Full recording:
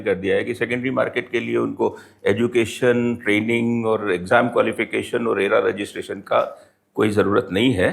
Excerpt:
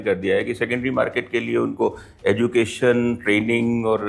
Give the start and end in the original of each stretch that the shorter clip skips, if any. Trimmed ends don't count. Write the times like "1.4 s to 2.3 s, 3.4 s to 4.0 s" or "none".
none